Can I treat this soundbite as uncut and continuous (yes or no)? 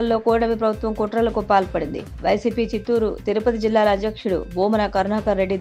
yes